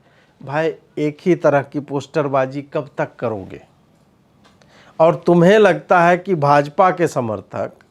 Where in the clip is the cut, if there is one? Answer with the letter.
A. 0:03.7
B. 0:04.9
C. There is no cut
C